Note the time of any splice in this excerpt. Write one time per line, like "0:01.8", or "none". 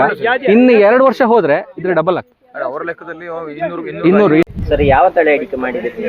0:04.6